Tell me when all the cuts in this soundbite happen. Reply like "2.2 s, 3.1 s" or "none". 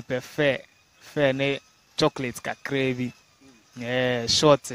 none